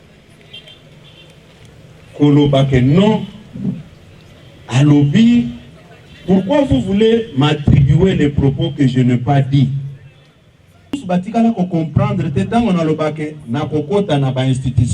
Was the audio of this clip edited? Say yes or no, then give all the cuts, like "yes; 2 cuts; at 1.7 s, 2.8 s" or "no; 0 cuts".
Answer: yes; 1 cut; at 11.0 s